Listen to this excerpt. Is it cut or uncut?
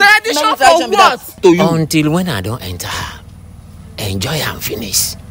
cut